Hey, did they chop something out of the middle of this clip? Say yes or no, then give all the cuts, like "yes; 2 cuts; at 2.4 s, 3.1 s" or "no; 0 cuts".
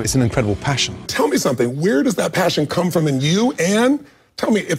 yes; 1 cut; at 1.1 s